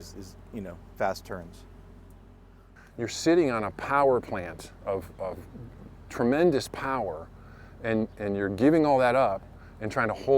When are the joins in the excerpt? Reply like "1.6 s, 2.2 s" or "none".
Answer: 2.8 s